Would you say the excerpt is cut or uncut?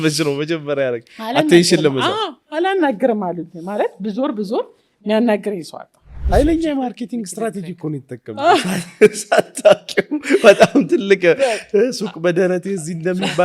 cut